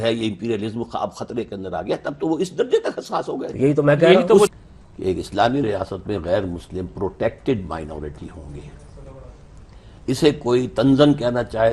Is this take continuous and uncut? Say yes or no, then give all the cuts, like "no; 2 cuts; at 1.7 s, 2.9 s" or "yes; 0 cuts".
no; 1 cut; at 4.5 s